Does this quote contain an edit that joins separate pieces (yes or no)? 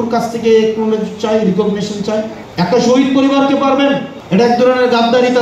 yes